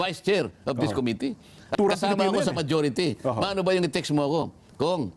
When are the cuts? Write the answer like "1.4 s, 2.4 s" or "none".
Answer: 1.7 s